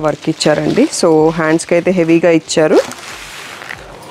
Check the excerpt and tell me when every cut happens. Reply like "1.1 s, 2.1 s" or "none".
none

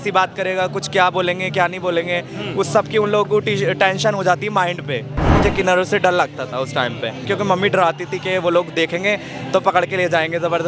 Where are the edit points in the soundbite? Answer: 5.3 s, 7.2 s

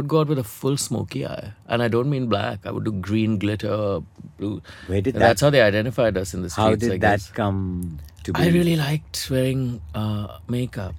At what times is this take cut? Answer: 4.7 s

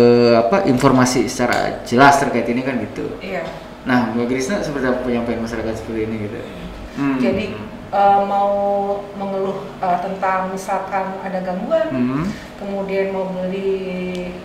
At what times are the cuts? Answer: 6.8 s

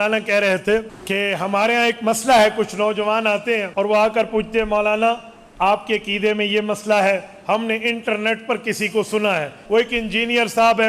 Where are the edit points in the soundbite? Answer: 1.0 s, 3.7 s, 9.6 s

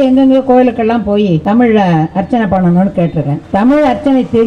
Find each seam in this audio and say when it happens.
1.4 s, 3.4 s

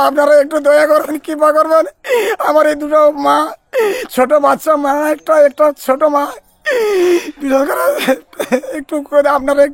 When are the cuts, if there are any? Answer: none

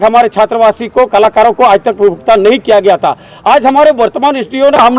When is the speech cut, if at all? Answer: none

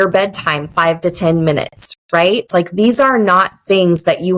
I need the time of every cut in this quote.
2.1 s

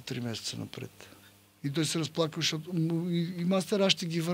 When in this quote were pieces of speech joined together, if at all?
none

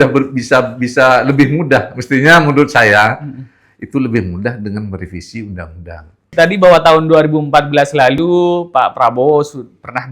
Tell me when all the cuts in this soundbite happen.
6.3 s

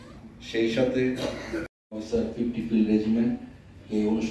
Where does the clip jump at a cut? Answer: 1.8 s

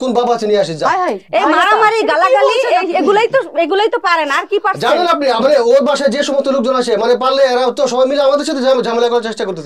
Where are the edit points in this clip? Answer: none

